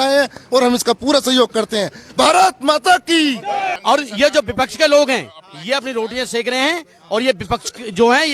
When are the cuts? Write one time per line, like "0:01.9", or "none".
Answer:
0:03.7